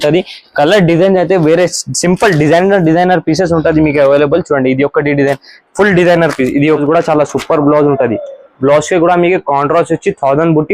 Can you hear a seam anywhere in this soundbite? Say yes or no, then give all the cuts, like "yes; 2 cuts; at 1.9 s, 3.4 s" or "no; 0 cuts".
yes; 1 cut; at 6.8 s